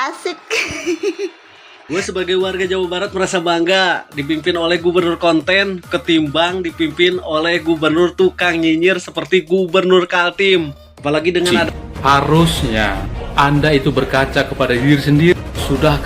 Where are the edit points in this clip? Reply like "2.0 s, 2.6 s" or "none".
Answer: 1.8 s, 11.6 s